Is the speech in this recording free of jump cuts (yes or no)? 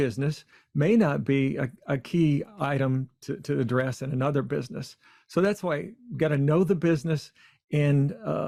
yes